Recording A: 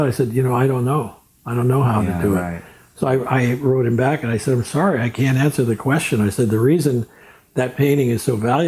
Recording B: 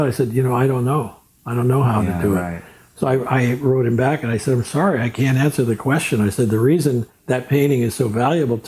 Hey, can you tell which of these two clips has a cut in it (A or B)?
B